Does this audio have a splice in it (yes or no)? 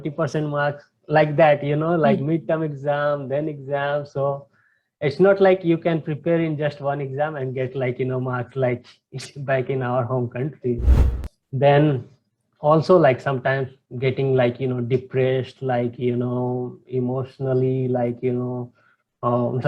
yes